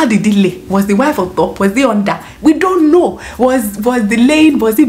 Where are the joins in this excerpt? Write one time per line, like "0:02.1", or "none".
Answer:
none